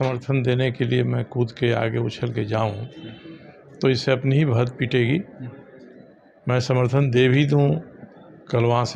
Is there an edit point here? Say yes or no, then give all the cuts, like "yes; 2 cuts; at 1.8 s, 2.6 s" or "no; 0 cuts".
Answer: no; 0 cuts